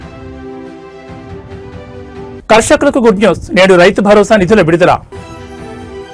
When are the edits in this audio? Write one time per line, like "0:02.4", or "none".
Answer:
0:02.4